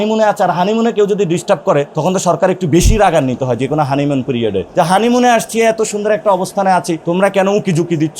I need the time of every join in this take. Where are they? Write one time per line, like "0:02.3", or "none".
0:01.9
0:04.6
0:07.0

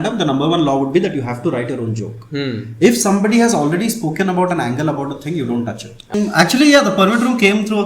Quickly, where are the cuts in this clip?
0:06.1

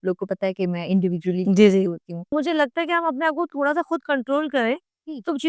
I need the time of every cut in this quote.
0:02.3

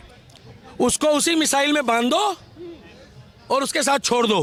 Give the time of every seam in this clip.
none

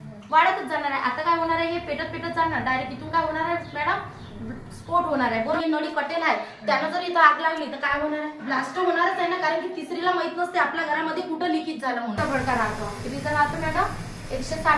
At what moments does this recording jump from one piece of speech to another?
0:05.6
0:08.4
0:12.2

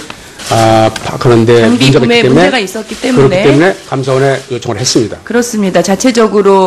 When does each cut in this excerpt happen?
0:01.7

